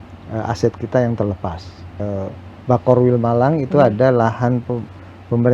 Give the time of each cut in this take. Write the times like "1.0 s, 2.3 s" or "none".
2.0 s